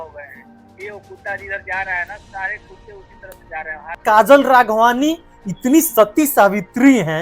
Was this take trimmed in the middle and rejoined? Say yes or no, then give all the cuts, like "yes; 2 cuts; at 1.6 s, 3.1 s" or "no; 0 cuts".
yes; 1 cut; at 4.0 s